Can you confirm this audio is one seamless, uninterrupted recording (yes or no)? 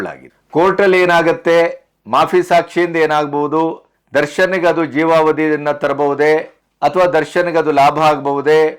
yes